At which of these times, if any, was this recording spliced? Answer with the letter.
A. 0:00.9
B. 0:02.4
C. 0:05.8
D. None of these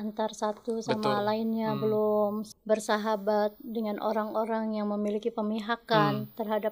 B